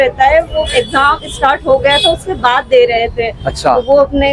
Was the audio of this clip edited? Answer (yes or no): no